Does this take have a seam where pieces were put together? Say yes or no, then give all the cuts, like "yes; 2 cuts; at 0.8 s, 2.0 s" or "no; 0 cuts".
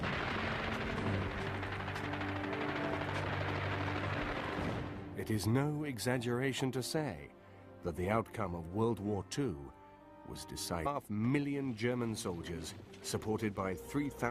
no; 0 cuts